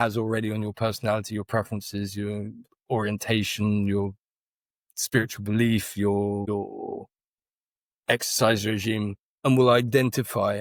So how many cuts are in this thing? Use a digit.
0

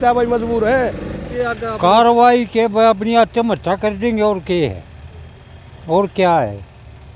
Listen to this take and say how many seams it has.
1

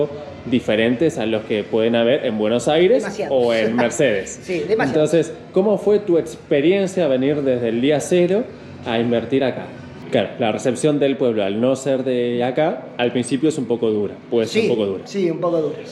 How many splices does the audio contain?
1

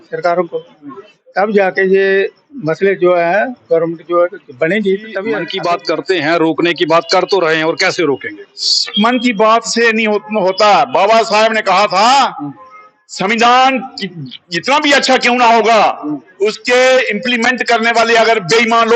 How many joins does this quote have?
1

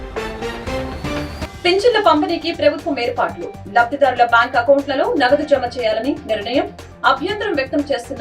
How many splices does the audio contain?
1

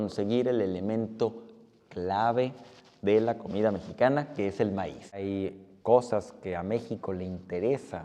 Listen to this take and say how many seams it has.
1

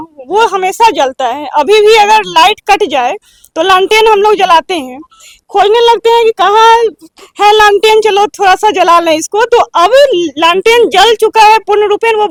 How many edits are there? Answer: 0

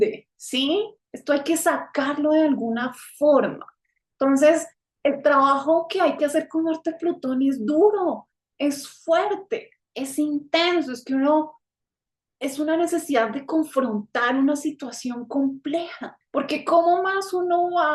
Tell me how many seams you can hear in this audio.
1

